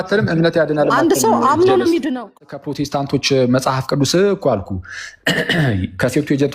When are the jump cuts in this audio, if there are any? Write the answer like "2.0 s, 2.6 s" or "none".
2.4 s